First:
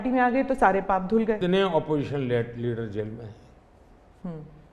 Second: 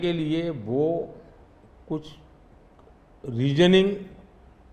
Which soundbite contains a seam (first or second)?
first